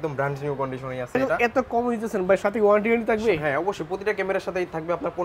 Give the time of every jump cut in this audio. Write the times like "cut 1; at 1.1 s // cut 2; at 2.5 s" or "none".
cut 1; at 1.2 s